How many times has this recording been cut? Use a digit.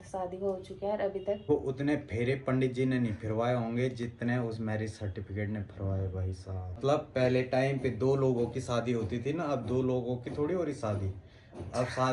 2